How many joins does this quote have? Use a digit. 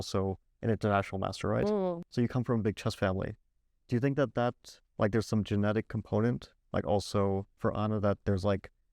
0